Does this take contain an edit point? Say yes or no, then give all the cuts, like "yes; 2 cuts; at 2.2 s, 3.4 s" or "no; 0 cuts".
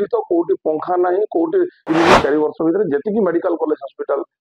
yes; 1 cut; at 1.8 s